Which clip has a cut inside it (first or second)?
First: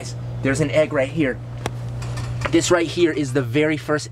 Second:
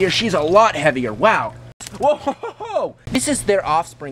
second